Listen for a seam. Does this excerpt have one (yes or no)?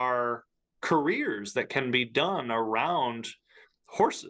no